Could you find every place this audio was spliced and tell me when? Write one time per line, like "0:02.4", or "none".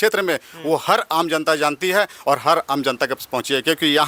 none

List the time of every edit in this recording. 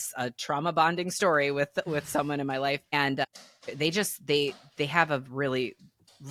none

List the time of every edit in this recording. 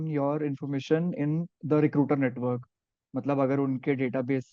none

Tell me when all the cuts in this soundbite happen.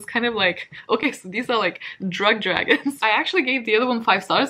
none

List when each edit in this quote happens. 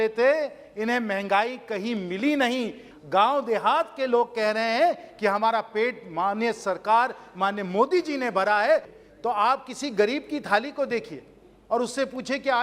0:02.9
0:08.9

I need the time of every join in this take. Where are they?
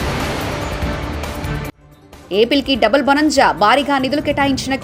none

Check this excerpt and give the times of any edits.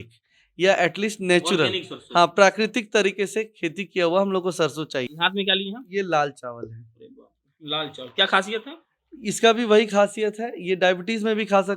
0:05.1

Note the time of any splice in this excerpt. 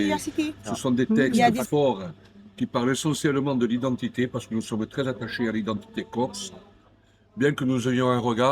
0:01.6

